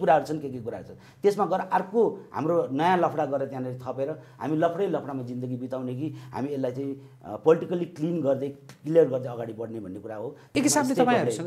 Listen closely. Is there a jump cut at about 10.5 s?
yes; 1 cut; at 10.5 s

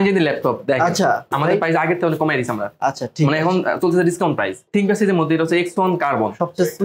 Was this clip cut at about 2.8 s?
no; 2 cuts; at 1.4 s, 4.7 s

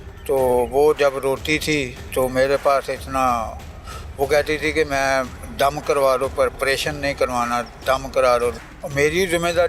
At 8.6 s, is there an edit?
yes; 1 cut; at 8.6 s

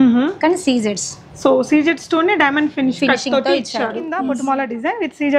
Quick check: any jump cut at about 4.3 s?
yes; 1 cut; at 4.3 s

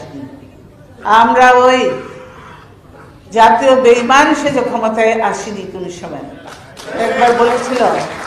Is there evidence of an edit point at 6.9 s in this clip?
no; 0 cuts

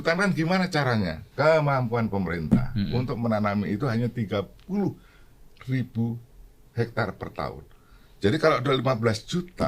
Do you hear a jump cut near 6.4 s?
no; 1 cut; at 1.2 s

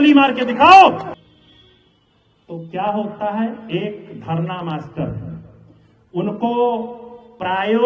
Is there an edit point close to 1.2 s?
yes; 1 cut; at 1.2 s

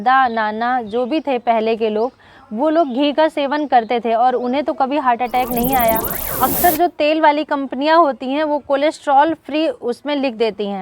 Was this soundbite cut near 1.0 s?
no; 1 cut; at 6.2 s

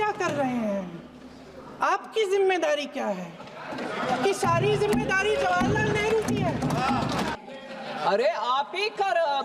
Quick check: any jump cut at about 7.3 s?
yes; 1 cut; at 7.3 s

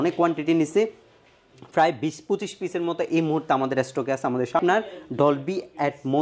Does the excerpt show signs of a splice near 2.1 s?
no; 1 cut; at 4.6 s

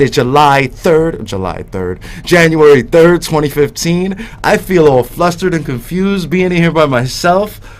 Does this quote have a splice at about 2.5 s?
yes; 1 cut; at 2.5 s

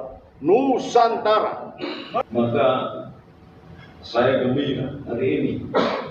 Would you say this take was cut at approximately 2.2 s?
yes; 1 cut; at 2.2 s

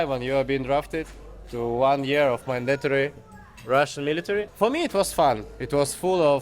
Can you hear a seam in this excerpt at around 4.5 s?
yes; 1 cut; at 4.5 s

